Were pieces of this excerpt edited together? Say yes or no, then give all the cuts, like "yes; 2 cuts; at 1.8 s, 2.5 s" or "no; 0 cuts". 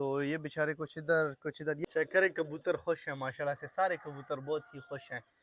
yes; 1 cut; at 1.8 s